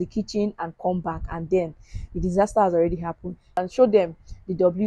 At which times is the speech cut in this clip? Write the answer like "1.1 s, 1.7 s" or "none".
3.4 s

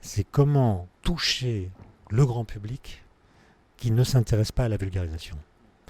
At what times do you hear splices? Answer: 0.9 s

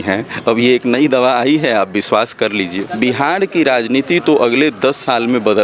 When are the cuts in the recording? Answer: 2.8 s

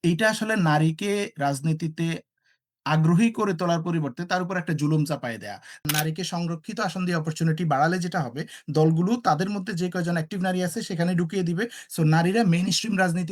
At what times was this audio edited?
5.8 s

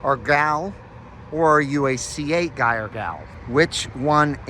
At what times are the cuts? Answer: 3.3 s

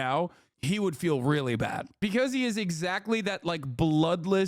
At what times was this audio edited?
2.0 s

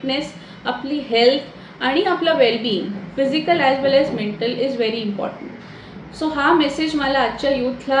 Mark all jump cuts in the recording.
none

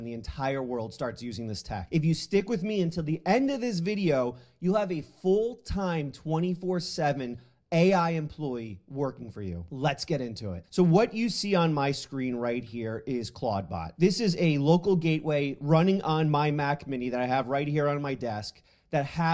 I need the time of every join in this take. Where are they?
14.2 s

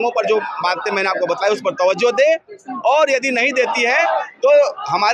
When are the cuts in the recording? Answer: none

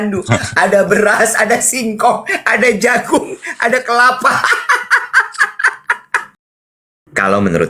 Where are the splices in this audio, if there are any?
6.6 s

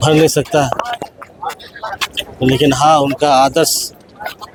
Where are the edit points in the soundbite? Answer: none

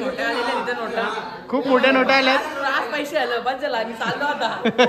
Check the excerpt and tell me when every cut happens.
none

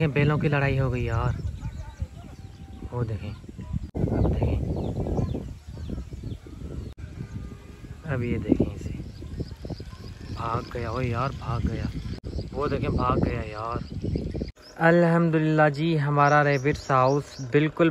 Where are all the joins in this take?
3.9 s, 7.0 s, 14.6 s

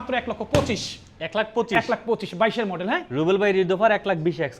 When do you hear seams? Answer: 3.1 s

